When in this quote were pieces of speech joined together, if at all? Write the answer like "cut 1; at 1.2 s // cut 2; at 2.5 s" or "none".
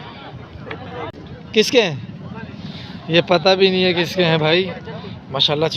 cut 1; at 1.1 s